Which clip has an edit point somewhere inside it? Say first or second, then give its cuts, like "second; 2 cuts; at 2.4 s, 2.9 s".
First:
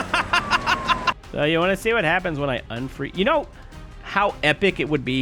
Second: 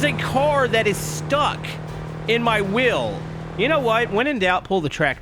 first; 1 cut; at 1.2 s